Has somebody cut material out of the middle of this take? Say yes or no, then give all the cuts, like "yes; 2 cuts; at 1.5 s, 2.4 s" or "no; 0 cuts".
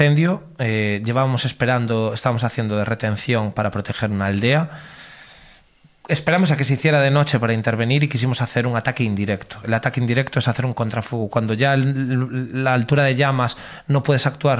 no; 0 cuts